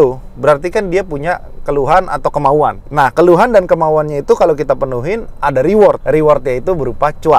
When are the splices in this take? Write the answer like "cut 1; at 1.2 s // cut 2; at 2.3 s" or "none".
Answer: cut 1; at 2.8 s // cut 2; at 6.0 s